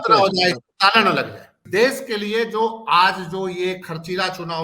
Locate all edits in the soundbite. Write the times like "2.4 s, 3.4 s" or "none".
1.6 s